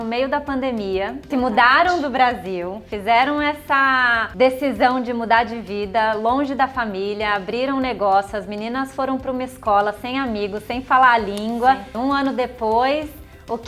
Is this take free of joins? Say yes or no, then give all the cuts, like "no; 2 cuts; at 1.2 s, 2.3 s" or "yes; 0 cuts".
no; 3 cuts; at 1.2 s, 4.2 s, 11.9 s